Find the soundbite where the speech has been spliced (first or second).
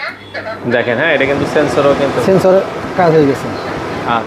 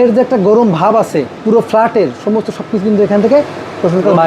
second